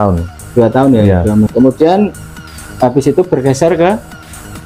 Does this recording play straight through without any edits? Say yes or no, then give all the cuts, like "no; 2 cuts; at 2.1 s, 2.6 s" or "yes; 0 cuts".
no; 1 cut; at 1.5 s